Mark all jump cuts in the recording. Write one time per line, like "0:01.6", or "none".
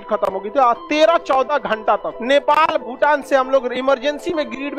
0:02.1